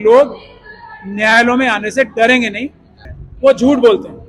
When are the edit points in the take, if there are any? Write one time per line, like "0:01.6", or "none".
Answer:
0:02.9